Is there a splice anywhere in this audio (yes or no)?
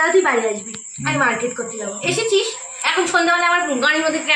no